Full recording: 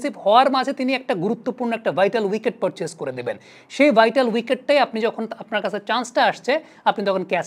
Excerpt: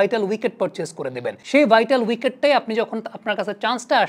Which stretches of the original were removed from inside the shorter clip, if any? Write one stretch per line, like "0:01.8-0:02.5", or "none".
0:03.4-0:03.6